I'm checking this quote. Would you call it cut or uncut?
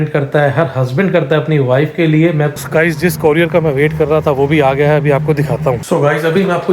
cut